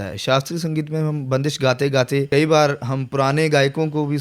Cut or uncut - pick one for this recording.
cut